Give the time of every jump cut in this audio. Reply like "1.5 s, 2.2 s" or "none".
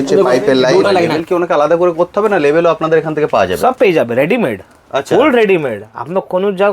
1.2 s

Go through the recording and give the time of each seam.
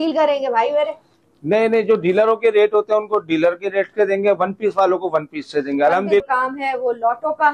6.2 s

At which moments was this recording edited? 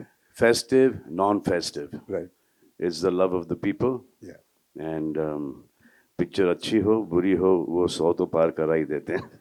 none

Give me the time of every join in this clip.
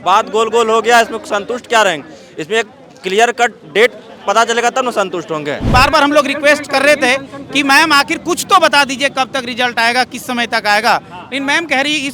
5.6 s

